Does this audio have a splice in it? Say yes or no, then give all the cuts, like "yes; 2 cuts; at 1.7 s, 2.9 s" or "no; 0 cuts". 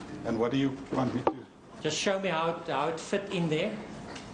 no; 0 cuts